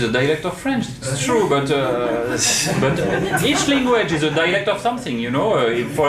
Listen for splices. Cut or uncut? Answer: cut